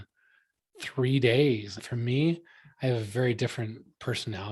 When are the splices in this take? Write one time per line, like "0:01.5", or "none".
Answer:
0:01.7